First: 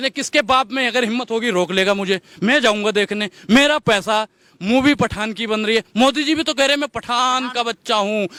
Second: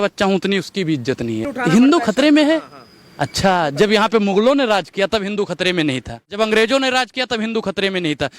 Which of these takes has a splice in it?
second; 2 cuts; at 1.5 s, 6.3 s

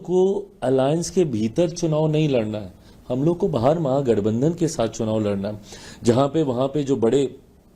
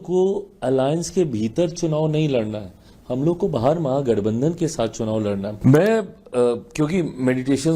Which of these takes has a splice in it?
second; 1 cut; at 5.5 s

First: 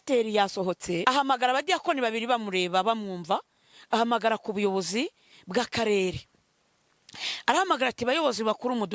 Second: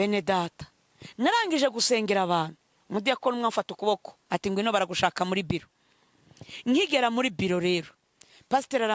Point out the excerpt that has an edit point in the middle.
first; 1 cut; at 1.0 s

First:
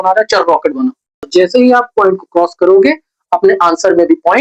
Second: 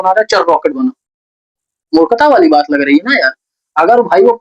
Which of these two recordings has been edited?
first; 1 cut; at 1.2 s

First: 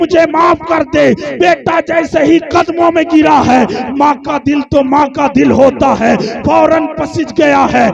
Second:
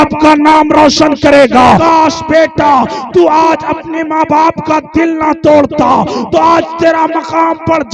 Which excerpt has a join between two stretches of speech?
second; 1 cut; at 1.8 s

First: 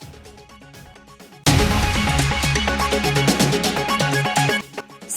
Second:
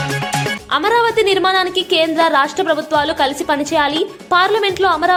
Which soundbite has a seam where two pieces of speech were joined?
first; 1 cut; at 0.9 s

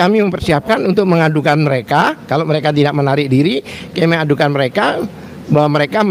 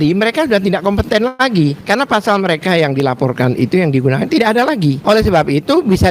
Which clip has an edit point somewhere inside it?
second; 2 cuts; at 1.8 s, 5.0 s

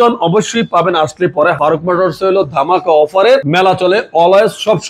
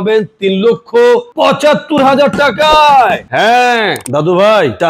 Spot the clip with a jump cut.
first; 2 cuts; at 1.6 s, 3.5 s

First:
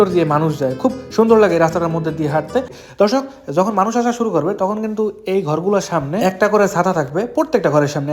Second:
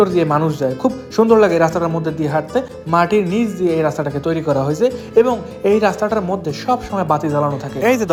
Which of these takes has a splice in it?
first; 1 cut; at 2.8 s

